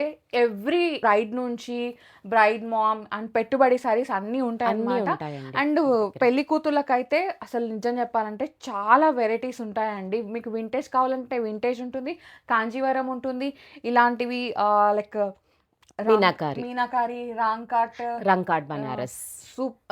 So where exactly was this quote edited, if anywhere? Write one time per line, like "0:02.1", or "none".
0:01.0